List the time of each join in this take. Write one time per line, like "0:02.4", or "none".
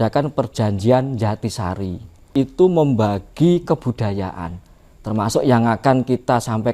0:02.3